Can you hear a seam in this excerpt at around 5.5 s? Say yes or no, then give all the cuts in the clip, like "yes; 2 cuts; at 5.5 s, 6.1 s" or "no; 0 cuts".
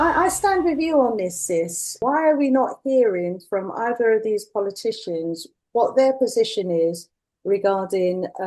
yes; 2 cuts; at 2.0 s, 5.5 s